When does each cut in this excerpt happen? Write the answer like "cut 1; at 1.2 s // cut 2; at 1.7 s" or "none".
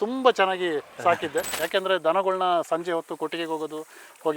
cut 1; at 1.5 s